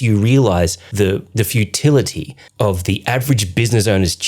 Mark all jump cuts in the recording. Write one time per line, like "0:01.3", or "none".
0:01.1
0:02.4